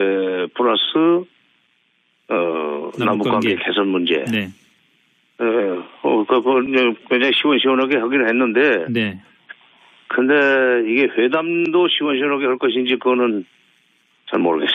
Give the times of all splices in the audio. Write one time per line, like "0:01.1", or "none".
0:05.7